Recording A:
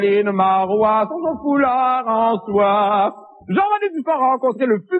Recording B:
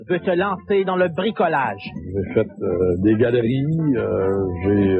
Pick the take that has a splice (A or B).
B